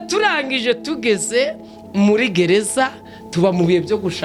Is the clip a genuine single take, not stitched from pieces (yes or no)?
yes